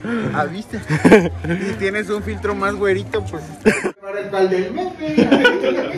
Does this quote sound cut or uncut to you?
cut